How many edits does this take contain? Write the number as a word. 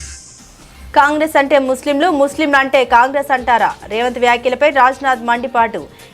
one